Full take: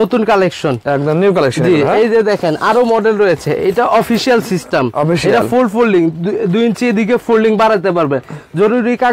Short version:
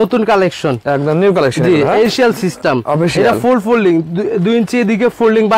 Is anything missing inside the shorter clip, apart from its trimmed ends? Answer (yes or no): yes